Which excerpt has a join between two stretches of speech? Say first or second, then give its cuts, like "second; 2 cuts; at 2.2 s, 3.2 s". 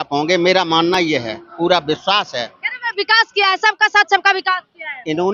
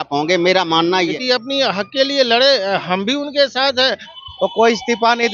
second; 2 cuts; at 1.0 s, 4.1 s